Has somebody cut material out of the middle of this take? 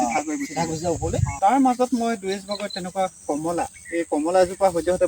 yes; 1 cut; at 1.3 s

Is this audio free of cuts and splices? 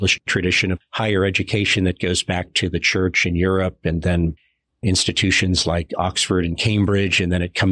yes; 0 cuts

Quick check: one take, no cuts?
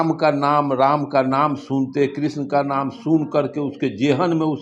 yes; 0 cuts

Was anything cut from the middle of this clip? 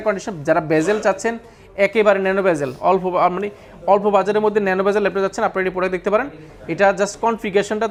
no; 0 cuts

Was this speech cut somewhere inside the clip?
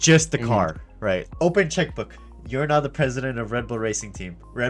yes; 1 cut; at 1.3 s

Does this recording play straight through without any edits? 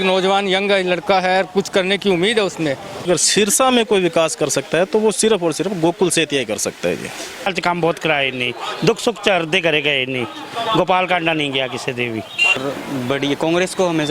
no; 3 cuts; at 3.1 s, 7.6 s, 12.6 s

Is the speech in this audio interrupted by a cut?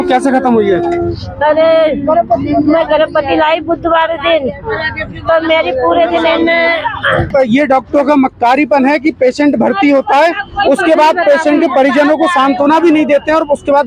yes; 1 cut; at 7.3 s

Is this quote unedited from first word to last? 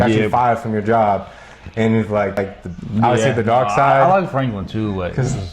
no; 1 cut; at 2.4 s

